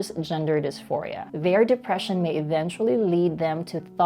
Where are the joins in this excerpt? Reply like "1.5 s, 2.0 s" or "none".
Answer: 1.2 s